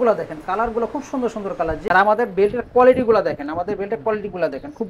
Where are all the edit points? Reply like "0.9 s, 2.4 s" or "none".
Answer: 1.8 s